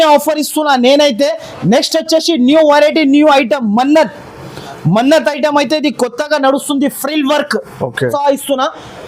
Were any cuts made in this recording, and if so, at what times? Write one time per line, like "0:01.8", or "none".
0:08.1